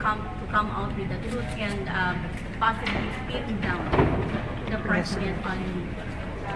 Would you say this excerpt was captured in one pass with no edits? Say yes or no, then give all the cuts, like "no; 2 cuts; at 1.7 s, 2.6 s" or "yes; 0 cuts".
yes; 0 cuts